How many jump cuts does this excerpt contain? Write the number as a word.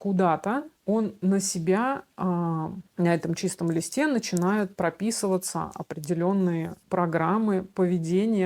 zero